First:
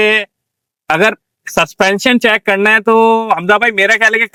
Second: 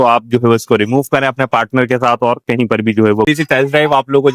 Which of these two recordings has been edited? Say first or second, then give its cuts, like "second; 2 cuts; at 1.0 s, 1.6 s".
second; 1 cut; at 3.3 s